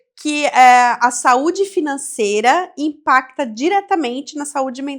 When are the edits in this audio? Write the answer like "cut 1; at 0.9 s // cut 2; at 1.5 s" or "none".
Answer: none